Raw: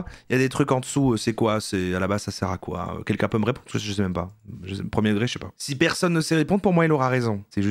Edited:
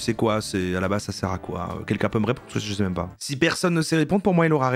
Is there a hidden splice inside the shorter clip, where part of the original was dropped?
yes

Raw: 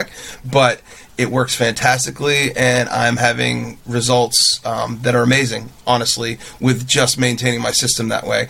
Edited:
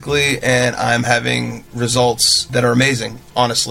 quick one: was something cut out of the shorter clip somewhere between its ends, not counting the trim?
yes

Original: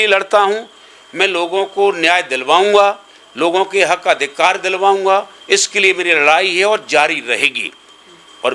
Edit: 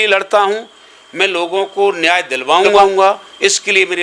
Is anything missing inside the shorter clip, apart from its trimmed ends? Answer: yes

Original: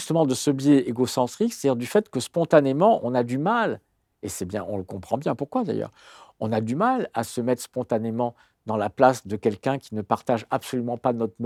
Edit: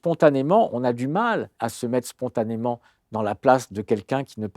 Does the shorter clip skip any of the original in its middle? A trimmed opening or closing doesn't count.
yes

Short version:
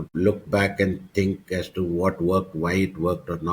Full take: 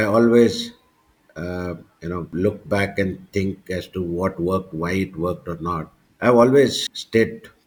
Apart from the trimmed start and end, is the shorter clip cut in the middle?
no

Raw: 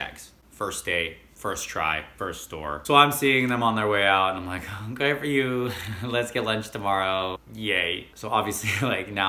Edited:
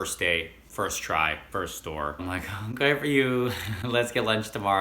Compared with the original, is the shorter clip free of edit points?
no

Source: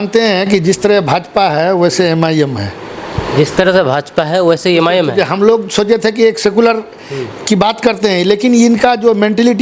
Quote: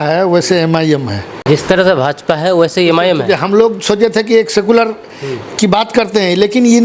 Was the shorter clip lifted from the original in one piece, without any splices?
no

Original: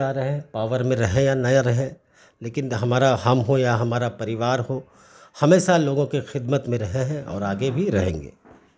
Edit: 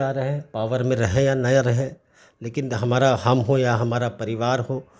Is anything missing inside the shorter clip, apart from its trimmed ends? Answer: no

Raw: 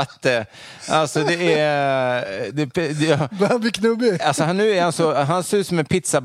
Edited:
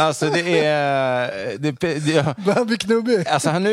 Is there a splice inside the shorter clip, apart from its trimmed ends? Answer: no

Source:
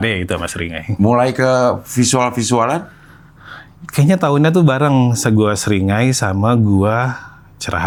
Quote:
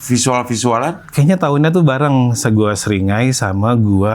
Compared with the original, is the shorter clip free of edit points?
no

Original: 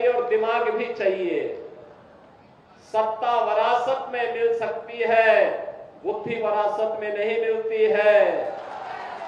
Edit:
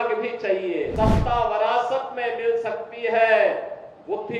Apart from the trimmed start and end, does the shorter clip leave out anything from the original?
yes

